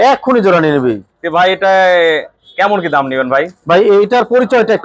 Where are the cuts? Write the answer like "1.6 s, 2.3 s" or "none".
none